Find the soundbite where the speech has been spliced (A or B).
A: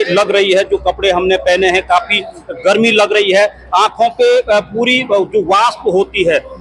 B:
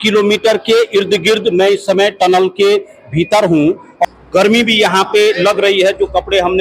B